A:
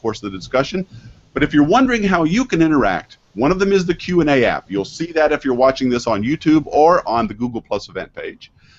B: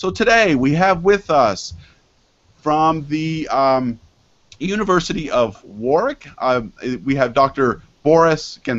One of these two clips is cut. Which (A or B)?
A